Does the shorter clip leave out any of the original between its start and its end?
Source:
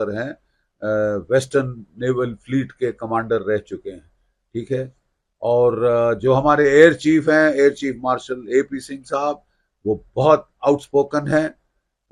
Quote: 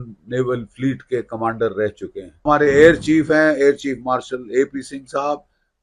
yes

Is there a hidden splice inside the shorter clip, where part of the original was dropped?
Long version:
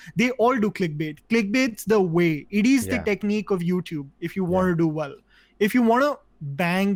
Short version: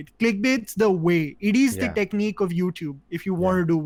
no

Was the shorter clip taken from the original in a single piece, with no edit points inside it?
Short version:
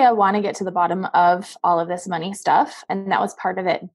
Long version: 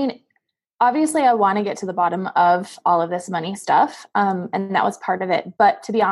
no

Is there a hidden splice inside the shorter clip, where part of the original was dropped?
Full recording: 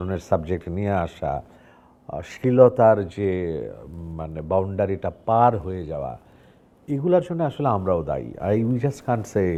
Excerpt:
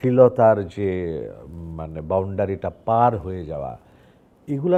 no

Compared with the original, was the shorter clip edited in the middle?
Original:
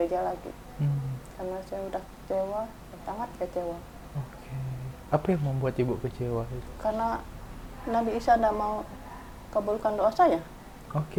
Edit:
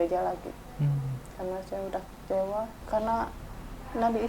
yes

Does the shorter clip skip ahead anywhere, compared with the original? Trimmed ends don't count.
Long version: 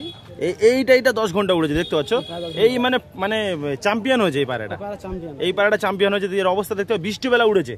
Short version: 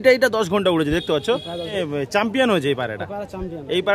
yes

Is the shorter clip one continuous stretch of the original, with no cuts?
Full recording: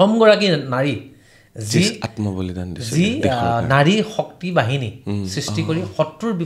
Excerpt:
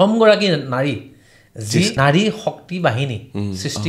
no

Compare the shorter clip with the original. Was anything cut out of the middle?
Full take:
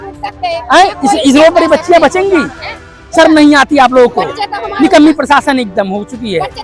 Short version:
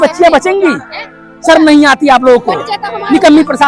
no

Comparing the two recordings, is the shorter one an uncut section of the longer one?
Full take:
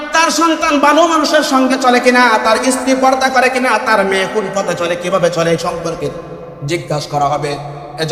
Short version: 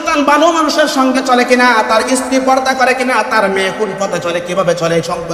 yes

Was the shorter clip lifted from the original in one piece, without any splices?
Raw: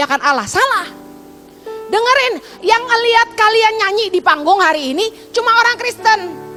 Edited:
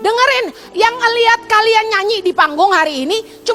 yes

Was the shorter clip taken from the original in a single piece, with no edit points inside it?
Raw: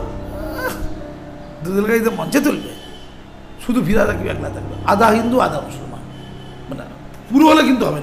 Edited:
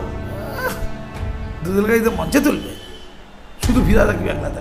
yes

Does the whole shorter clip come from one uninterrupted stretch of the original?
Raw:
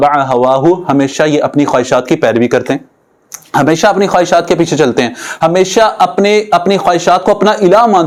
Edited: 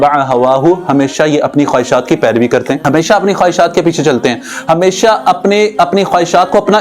no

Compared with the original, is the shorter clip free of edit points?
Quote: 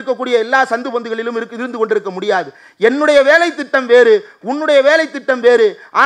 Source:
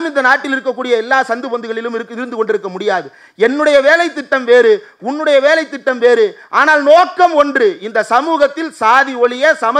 yes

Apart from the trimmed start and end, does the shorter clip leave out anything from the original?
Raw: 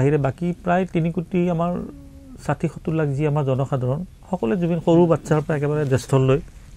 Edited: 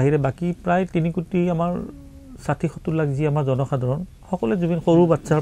no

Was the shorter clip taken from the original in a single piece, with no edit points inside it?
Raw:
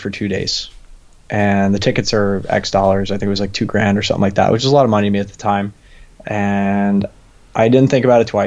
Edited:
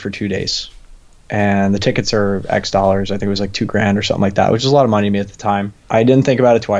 no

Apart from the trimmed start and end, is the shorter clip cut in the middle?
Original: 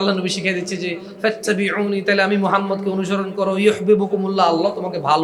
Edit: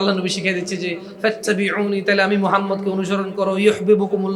no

